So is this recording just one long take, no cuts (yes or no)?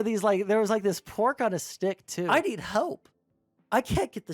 no